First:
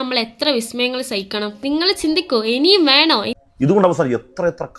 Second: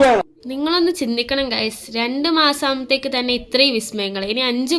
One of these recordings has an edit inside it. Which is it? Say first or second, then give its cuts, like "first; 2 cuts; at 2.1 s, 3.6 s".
first; 1 cut; at 3.3 s